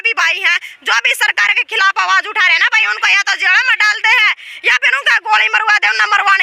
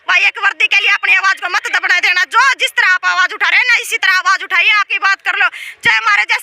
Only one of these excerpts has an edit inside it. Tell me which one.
second; 1 cut; at 4.9 s

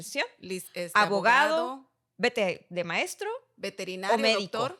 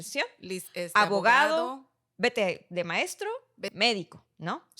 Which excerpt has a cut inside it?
second; 1 cut; at 3.6 s

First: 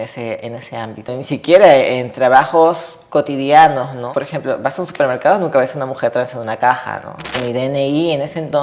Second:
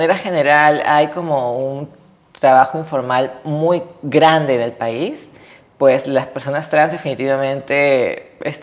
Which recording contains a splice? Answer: first; 3 cuts; at 1.2 s, 4.1 s, 7.4 s

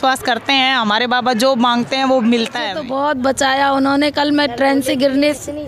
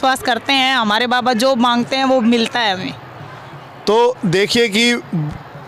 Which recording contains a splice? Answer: first; 1 cut; at 2.8 s

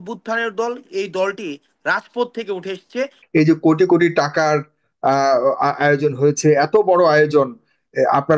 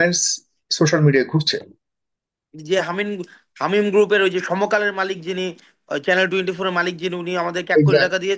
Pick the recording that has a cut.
first; 1 cut; at 3.2 s

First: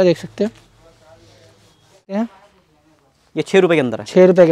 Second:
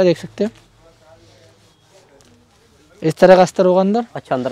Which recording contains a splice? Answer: first; 1 cut; at 2.2 s

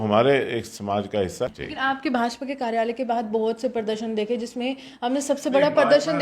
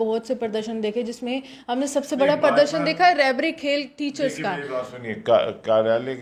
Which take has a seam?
first; 1 cut; at 1.1 s

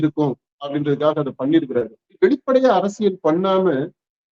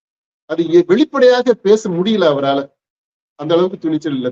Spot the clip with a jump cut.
first; 1 cut; at 2.0 s

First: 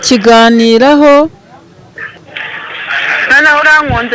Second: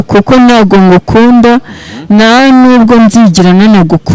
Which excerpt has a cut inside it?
first; 1 cut; at 2.1 s

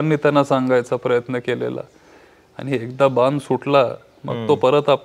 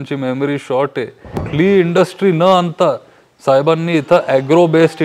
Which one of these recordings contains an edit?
second; 1 cut; at 1.5 s

